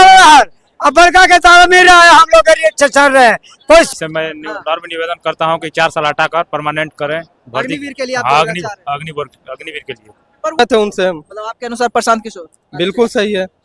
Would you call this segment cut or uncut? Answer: cut